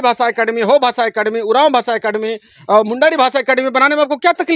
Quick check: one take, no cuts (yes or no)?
yes